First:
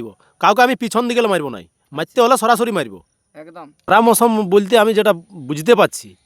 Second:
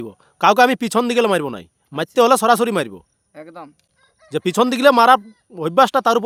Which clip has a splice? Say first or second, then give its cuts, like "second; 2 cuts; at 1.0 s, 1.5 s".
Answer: first; 1 cut; at 3.8 s